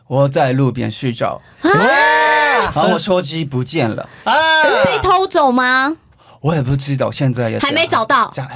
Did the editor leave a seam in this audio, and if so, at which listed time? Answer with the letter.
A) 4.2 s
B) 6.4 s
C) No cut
C